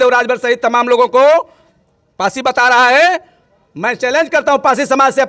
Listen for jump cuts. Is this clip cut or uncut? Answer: uncut